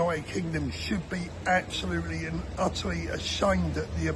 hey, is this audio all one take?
yes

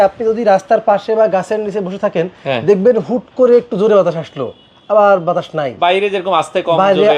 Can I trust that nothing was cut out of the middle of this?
yes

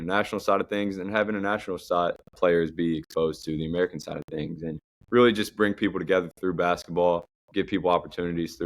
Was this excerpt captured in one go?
no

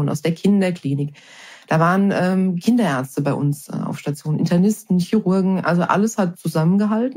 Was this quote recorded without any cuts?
yes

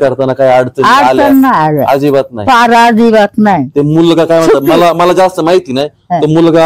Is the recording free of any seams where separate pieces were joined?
yes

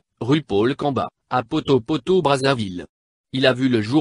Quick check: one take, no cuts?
yes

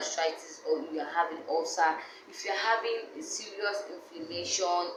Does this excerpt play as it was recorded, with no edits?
yes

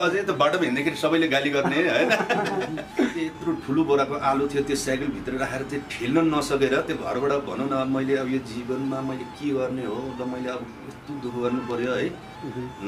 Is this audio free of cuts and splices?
no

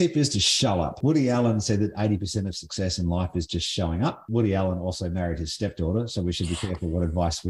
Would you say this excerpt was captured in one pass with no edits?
no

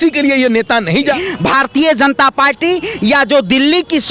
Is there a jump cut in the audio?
yes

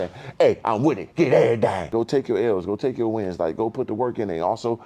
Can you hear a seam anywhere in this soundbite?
yes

